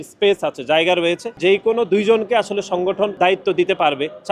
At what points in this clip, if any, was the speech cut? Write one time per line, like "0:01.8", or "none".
0:01.3
0:03.1